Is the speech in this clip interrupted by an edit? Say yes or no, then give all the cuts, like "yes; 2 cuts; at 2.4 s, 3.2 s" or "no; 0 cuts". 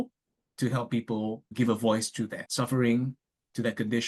yes; 2 cuts; at 1.5 s, 2.4 s